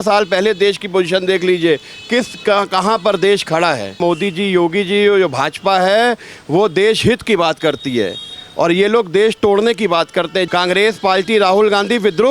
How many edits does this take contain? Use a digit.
2